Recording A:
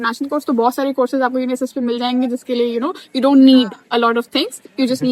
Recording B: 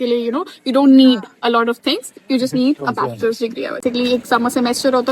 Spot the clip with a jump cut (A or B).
B